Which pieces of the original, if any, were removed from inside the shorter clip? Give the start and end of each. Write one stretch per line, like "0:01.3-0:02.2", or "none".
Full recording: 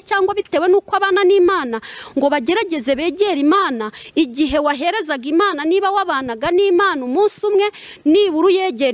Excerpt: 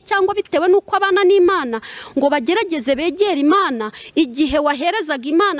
none